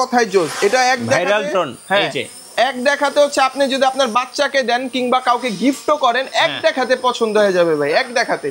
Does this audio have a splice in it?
no; 0 cuts

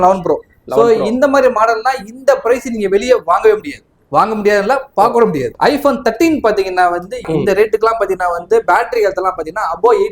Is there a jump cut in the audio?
yes; 2 cuts; at 5.5 s, 7.3 s

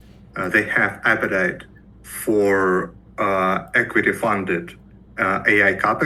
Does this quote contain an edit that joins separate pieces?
no; 0 cuts

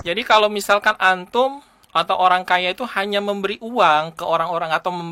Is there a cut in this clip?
no; 0 cuts

